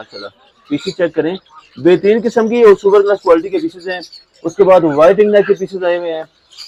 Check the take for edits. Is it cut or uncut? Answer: uncut